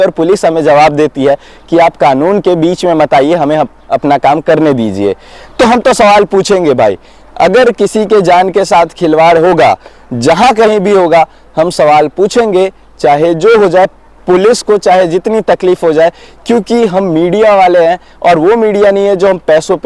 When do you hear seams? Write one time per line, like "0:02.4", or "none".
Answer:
none